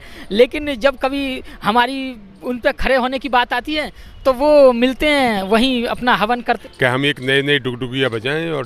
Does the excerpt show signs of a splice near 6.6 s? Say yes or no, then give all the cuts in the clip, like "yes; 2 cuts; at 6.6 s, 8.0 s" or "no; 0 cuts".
yes; 1 cut; at 6.6 s